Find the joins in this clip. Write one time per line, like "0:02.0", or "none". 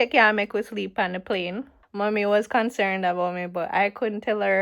0:01.8

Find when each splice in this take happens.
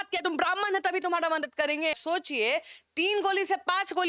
0:02.0

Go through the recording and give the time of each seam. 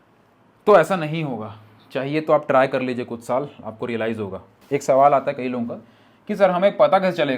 0:04.5

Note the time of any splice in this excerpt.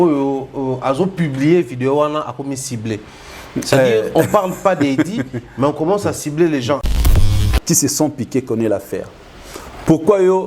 0:07.3

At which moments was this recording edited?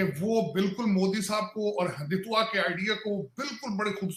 none

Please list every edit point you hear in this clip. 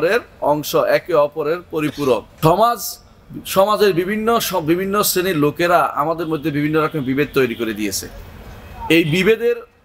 0:02.3

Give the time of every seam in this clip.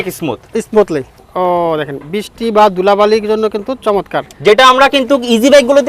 0:01.2

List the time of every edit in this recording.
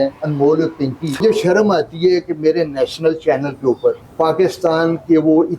0:01.2
0:04.0

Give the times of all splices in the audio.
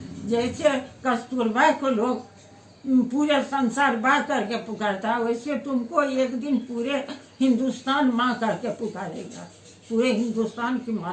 none

